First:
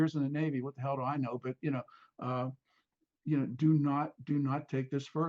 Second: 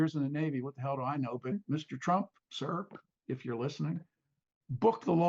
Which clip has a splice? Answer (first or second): second